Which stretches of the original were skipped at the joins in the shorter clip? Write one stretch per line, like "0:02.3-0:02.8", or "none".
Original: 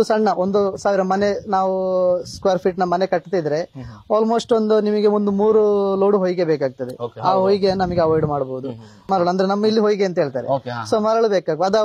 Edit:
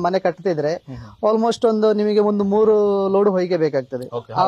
none